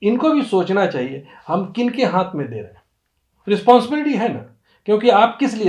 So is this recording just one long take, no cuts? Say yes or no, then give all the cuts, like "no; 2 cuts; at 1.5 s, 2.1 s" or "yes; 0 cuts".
yes; 0 cuts